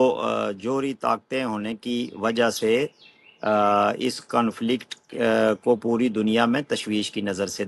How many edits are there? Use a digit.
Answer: 0